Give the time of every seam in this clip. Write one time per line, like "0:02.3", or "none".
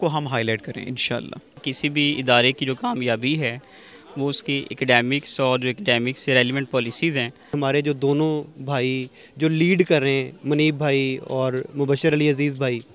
0:01.5
0:07.6